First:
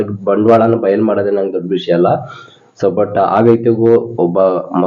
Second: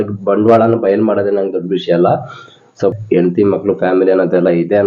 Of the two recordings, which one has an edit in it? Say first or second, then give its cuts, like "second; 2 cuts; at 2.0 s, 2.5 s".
second; 1 cut; at 2.8 s